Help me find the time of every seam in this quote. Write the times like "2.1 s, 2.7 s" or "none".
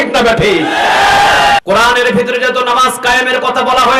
1.6 s

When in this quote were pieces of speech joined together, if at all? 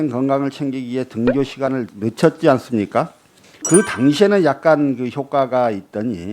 1.9 s, 3.6 s

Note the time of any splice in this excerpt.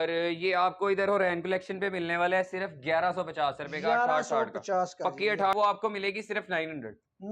5.5 s

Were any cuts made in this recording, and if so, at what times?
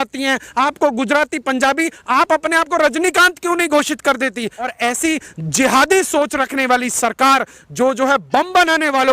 4.7 s

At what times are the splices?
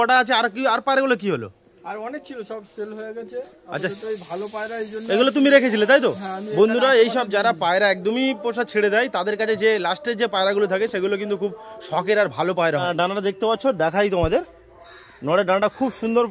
12.9 s

